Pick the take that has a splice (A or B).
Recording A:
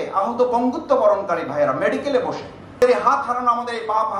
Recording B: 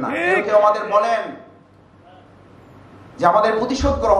A